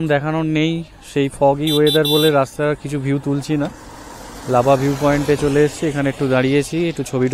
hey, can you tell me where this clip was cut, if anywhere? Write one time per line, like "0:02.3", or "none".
none